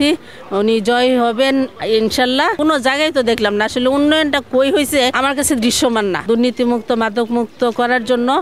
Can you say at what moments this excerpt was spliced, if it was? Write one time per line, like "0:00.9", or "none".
0:02.6
0:05.1
0:06.2

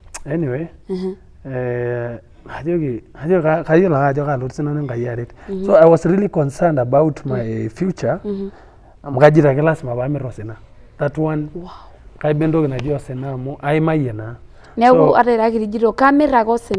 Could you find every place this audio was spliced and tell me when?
none

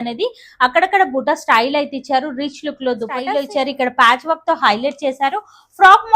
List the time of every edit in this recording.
0:03.3

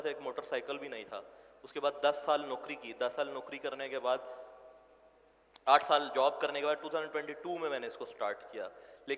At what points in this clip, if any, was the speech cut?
none

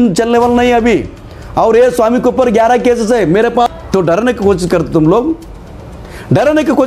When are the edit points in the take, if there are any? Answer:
0:03.8

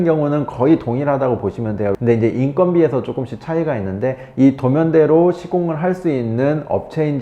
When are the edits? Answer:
0:01.9

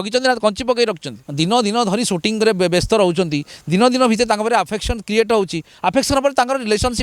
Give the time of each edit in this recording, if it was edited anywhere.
0:01.2

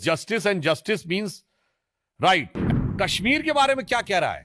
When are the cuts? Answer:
0:02.6

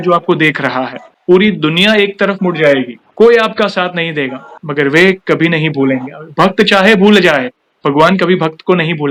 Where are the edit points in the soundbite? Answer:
none

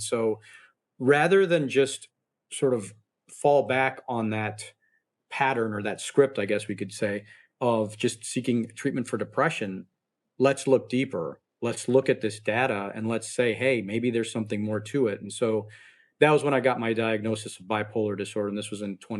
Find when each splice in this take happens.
none

